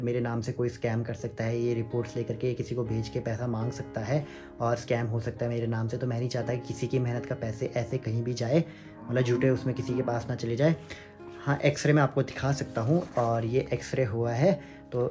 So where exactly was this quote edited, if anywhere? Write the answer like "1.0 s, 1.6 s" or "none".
none